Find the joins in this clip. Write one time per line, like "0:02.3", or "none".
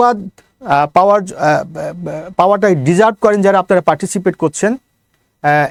none